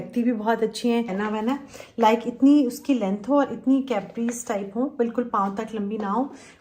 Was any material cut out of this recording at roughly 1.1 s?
yes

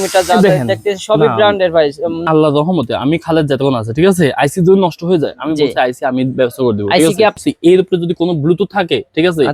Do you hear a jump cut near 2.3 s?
yes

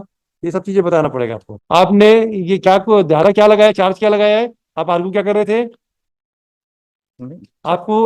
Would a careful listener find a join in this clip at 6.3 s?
no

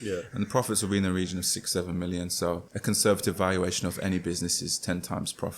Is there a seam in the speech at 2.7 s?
yes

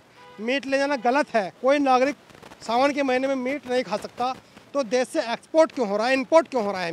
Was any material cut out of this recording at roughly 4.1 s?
no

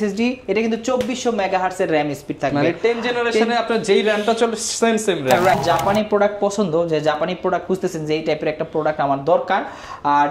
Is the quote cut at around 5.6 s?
yes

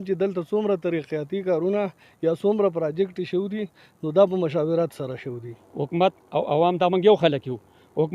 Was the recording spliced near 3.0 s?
no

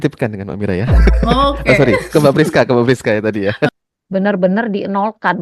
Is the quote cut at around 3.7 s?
yes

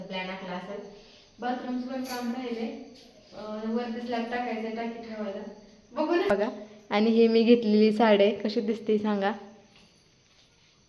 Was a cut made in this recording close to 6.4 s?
yes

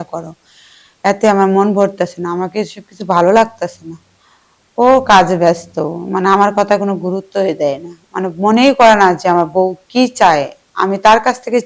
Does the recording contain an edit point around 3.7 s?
no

